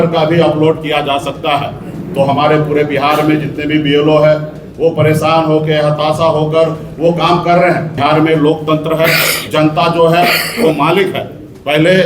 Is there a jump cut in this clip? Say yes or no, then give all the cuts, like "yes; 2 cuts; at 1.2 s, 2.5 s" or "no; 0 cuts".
yes; 1 cut; at 7.9 s